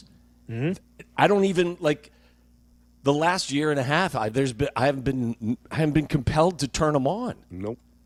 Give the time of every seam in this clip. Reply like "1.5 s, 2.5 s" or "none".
none